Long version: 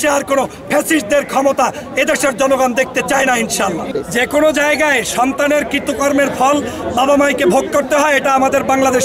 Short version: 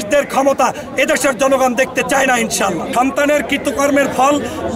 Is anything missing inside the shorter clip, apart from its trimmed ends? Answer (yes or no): yes